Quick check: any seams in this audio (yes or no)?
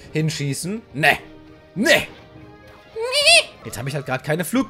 yes